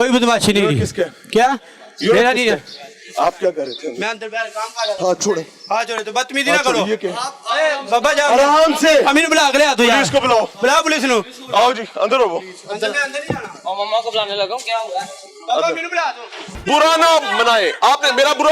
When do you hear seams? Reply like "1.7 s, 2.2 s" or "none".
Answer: none